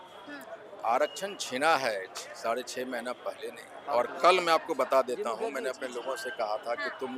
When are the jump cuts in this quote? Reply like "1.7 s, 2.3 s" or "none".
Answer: 3.8 s